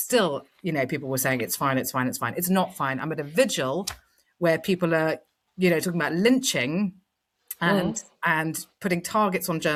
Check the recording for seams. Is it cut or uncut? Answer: uncut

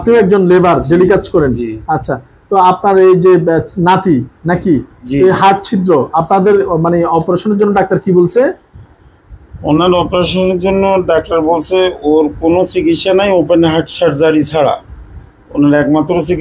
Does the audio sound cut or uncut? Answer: uncut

